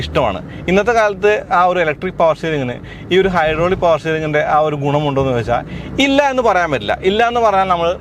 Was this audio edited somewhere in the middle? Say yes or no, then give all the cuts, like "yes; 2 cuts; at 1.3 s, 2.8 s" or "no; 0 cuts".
no; 0 cuts